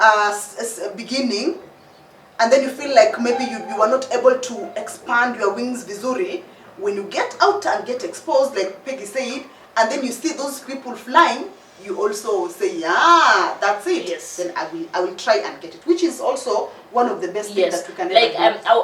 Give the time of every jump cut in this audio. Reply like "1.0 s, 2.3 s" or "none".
none